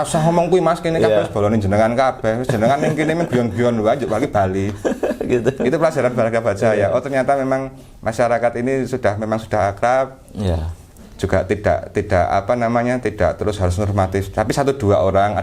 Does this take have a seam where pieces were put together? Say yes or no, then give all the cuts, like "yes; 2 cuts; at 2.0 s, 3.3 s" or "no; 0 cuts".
no; 0 cuts